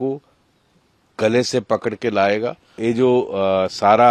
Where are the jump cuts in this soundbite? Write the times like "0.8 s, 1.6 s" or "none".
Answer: 2.8 s